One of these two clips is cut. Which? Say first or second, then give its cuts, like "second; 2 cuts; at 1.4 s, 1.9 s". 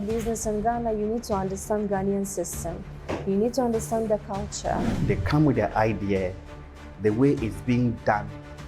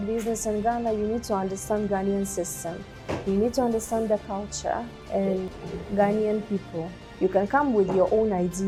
first; 1 cut; at 5.0 s